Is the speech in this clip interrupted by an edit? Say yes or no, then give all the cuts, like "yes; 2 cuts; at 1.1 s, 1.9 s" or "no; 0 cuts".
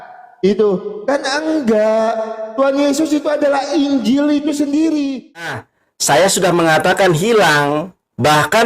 yes; 1 cut; at 5.5 s